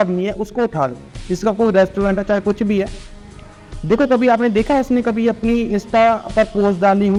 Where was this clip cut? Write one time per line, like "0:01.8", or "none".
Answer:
none